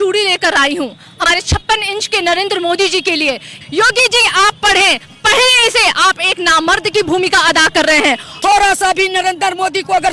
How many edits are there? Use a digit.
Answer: 3